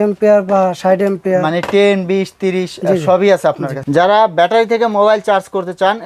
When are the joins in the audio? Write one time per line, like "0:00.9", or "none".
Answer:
0:03.8

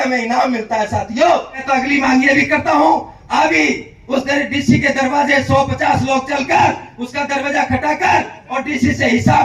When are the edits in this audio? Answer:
0:01.6

